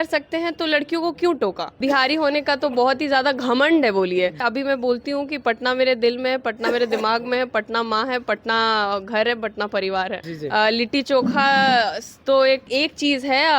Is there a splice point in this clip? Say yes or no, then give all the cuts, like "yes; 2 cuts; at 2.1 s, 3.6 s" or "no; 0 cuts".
yes; 4 cuts; at 1.8 s, 4.4 s, 10.3 s, 12.7 s